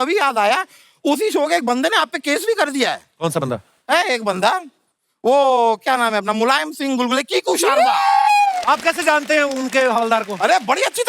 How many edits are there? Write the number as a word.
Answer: one